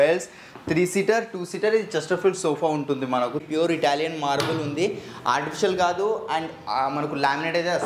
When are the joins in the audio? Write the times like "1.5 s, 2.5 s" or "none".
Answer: 3.4 s